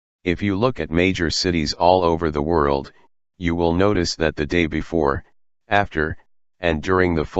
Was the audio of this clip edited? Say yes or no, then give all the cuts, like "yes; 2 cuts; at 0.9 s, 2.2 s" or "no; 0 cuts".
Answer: no; 0 cuts